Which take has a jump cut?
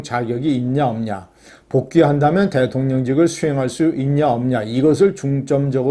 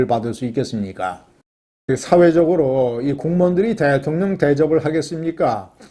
second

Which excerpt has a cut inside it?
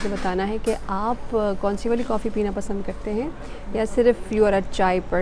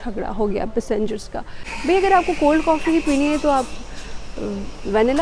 second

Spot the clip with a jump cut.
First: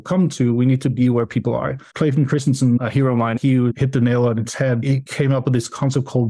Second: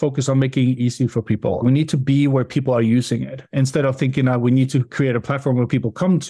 first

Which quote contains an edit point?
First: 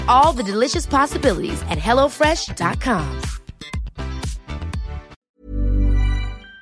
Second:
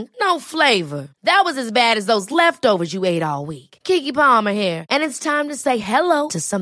first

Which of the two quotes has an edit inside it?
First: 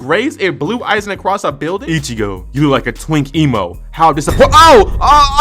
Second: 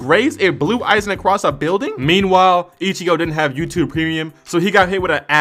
first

